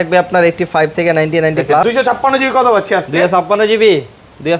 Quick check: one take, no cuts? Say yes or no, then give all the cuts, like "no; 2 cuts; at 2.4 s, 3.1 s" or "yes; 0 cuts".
no; 1 cut; at 1.8 s